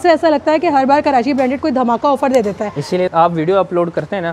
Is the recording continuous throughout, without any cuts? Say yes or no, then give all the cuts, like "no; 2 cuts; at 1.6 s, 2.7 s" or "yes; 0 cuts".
no; 1 cut; at 3.1 s